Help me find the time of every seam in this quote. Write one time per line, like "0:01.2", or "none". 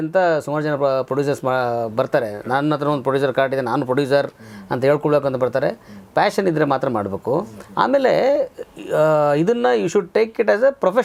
none